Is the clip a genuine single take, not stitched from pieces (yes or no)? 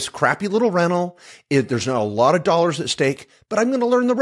yes